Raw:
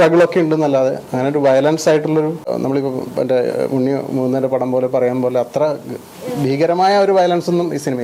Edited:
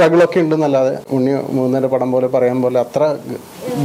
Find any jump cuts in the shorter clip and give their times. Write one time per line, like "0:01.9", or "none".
0:01.1